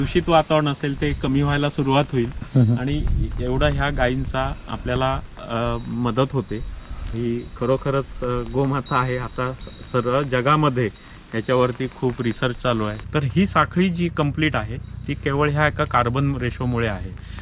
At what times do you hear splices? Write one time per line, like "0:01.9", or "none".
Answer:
0:13.0